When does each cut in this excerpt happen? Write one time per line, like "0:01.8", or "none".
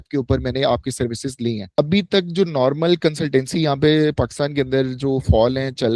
0:01.8